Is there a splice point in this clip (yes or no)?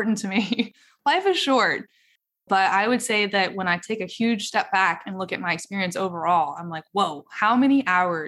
yes